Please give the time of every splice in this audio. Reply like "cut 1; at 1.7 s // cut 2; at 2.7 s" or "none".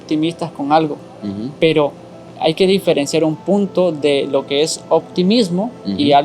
cut 1; at 2.2 s